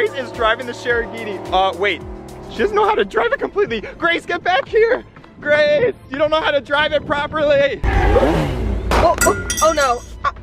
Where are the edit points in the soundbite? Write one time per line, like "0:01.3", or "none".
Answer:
0:07.8